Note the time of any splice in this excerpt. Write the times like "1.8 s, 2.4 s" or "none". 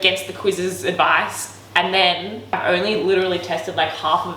2.5 s